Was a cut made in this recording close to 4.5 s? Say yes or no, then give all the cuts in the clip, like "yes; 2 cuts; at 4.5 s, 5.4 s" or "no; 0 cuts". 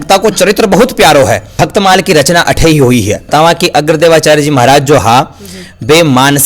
no; 2 cuts; at 1.5 s, 3.3 s